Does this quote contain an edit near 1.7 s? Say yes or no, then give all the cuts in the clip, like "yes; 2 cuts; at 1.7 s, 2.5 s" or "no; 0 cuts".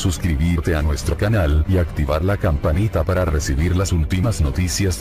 no; 0 cuts